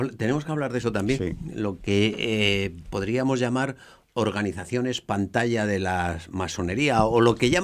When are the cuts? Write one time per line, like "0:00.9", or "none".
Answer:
none